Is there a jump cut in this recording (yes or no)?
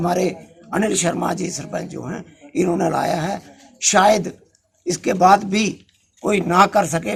no